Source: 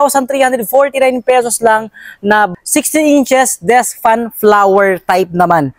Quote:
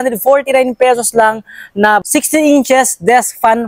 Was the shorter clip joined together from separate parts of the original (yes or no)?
yes